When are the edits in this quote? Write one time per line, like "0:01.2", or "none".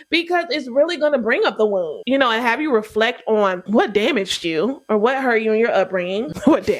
0:02.0
0:03.6